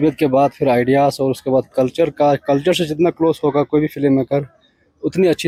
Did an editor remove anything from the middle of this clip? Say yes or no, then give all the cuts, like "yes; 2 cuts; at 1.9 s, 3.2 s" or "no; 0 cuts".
no; 0 cuts